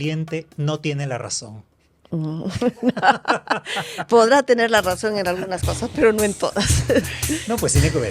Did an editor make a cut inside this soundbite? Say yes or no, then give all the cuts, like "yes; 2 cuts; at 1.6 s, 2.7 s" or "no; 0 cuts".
no; 0 cuts